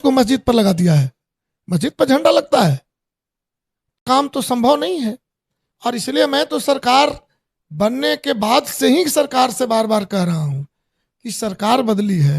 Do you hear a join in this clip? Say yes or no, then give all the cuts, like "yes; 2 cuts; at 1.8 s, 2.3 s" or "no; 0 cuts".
yes; 1 cut; at 4.0 s